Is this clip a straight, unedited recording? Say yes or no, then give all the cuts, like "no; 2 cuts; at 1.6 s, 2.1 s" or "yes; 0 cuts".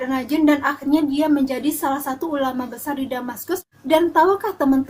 no; 1 cut; at 3.7 s